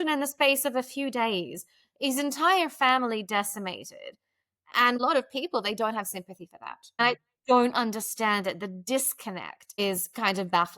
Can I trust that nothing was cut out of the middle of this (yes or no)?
no